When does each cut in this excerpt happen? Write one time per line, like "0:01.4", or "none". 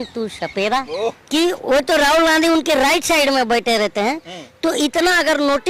0:01.2